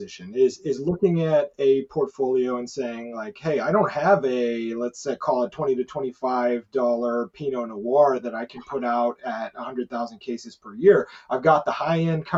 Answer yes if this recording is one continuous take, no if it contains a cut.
yes